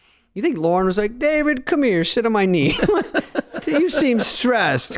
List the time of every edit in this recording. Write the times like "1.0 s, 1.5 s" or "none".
none